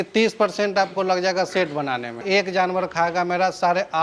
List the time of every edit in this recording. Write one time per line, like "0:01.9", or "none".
0:02.2